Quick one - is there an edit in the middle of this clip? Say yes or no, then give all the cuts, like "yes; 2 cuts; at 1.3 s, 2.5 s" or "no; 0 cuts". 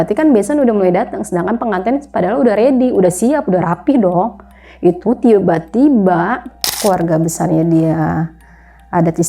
yes; 1 cut; at 6.7 s